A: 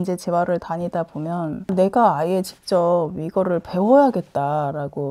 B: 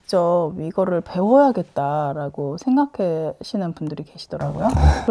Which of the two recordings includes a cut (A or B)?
A